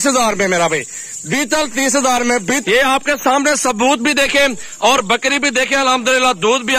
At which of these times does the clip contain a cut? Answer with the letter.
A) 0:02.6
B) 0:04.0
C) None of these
A